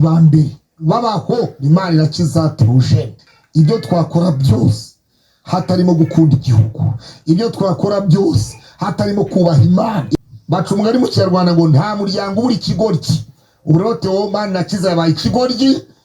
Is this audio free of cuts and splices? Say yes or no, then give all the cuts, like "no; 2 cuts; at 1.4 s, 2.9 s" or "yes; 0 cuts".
no; 2 cuts; at 3.2 s, 10.1 s